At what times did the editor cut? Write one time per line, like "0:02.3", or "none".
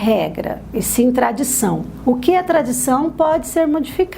0:01.9